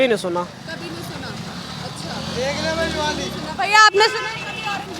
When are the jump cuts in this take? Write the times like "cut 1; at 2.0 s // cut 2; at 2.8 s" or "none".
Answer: none